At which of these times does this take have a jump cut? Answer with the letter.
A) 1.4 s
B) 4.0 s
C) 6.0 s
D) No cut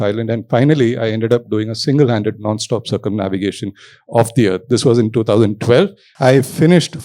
C